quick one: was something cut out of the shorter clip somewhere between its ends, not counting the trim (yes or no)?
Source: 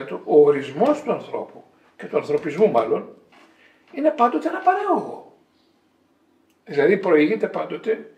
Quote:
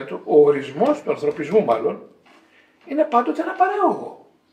yes